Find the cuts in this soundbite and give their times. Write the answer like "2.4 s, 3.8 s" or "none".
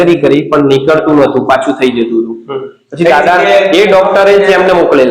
none